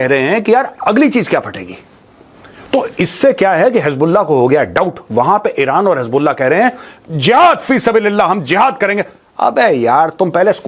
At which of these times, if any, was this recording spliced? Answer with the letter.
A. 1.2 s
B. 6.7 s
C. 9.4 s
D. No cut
D